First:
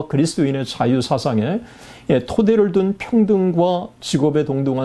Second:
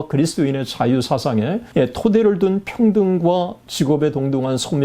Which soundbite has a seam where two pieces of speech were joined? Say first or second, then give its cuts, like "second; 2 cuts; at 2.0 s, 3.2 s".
second; 1 cut; at 1.6 s